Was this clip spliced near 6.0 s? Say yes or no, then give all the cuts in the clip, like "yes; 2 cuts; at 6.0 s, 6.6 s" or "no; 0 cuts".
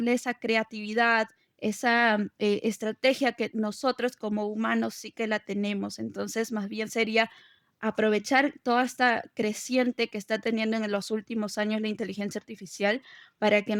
no; 0 cuts